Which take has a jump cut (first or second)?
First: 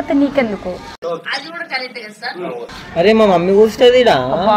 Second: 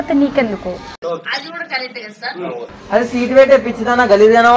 second